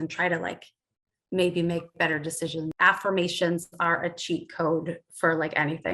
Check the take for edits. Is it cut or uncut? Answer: cut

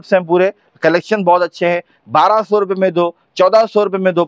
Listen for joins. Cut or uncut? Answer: uncut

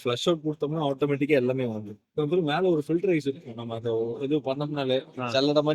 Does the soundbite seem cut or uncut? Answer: cut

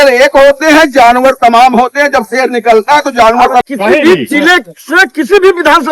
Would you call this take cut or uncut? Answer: cut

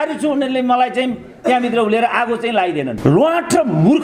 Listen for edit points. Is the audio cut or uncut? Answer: cut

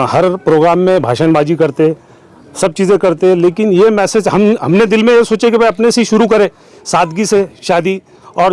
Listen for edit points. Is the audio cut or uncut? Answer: uncut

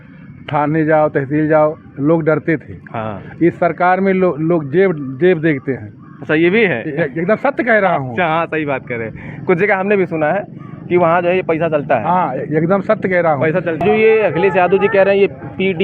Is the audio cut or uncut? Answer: cut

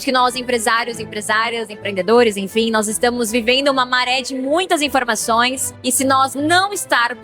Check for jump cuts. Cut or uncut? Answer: cut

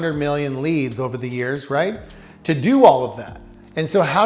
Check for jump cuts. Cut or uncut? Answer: uncut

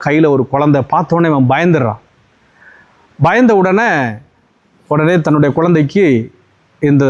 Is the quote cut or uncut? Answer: uncut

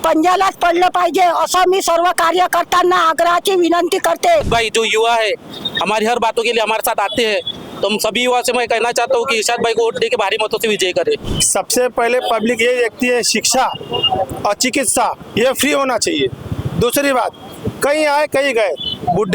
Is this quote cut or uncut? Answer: cut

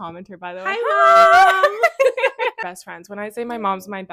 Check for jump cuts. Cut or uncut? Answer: uncut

